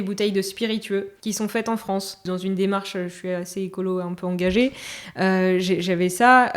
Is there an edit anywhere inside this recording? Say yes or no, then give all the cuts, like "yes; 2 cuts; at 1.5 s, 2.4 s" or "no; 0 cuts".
yes; 2 cuts; at 1.1 s, 2.2 s